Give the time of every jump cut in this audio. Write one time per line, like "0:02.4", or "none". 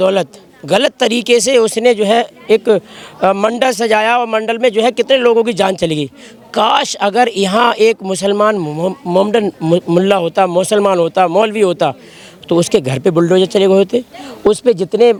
none